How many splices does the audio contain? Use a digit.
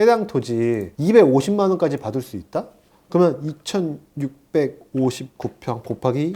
1